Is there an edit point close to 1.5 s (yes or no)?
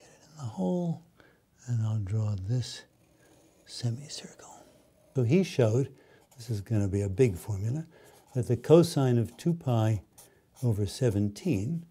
no